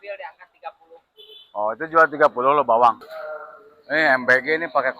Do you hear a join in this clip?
yes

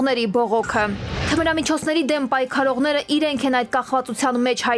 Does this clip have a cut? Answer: yes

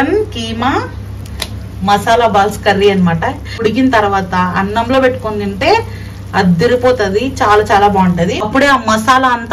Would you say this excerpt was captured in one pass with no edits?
no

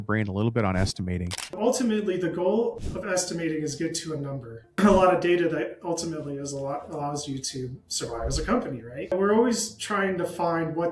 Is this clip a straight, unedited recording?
no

